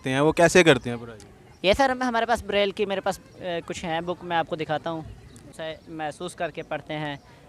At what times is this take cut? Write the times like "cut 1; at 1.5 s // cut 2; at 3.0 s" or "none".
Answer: cut 1; at 5.5 s